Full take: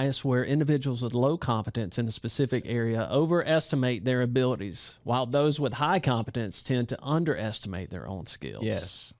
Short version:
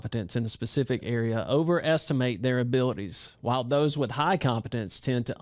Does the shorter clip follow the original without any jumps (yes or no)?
yes